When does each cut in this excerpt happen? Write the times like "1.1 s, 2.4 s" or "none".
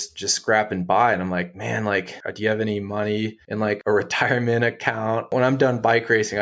2.2 s, 3.7 s, 5.3 s